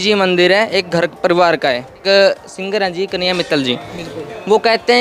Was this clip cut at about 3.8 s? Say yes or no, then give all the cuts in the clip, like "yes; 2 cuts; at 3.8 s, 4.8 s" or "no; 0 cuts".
no; 1 cut; at 2.0 s